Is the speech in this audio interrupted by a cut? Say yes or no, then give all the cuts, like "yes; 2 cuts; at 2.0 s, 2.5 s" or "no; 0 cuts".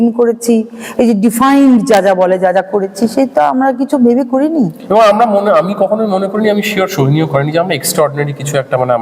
no; 0 cuts